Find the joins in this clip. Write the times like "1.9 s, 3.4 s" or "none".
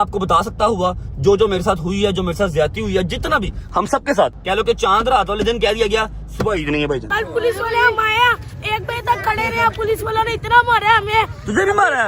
4.4 s, 7.1 s

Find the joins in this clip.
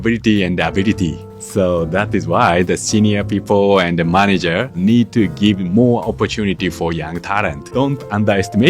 1.2 s, 4.8 s, 7.7 s

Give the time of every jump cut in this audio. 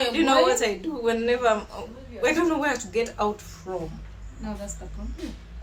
none

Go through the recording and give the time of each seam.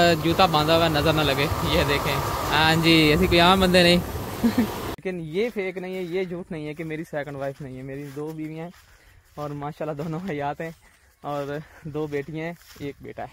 5.0 s

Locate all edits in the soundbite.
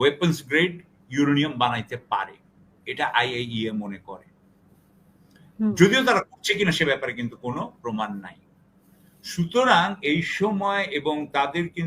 none

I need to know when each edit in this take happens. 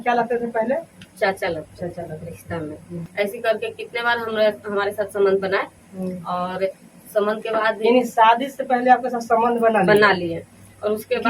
3.1 s

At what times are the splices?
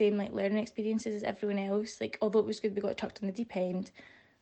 none

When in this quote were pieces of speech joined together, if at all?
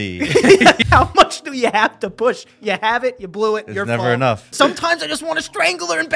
0.8 s, 4.5 s

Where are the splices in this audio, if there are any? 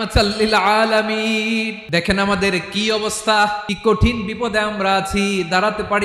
1.8 s, 3.7 s

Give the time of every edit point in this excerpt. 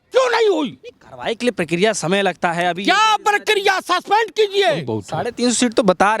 5.0 s

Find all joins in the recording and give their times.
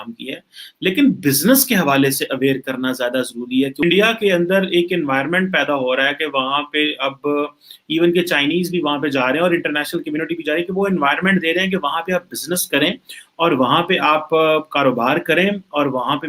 3.8 s

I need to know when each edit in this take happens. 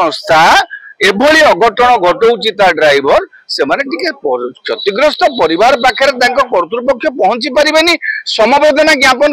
none

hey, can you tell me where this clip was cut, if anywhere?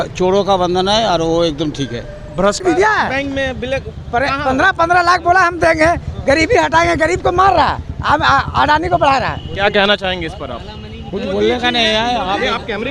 2.6 s

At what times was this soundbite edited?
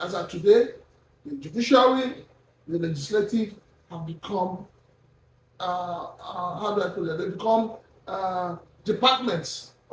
none

